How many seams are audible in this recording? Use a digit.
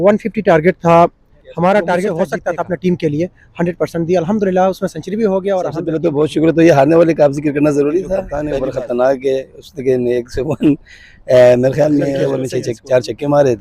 4